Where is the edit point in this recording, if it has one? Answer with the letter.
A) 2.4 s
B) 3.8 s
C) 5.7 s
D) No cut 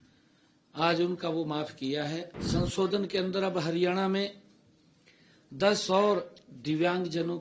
A